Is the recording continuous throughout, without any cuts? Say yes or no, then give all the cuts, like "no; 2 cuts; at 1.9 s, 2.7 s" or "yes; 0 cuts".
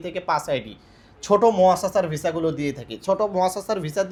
yes; 0 cuts